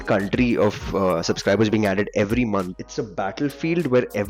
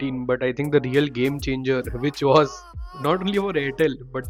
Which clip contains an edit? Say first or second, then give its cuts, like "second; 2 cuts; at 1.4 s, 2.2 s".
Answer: first; 1 cut; at 2.7 s